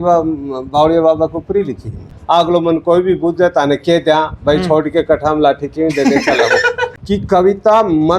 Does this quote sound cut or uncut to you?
cut